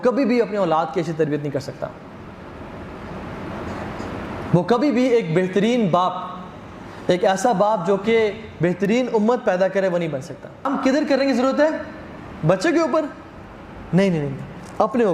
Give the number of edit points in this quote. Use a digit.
1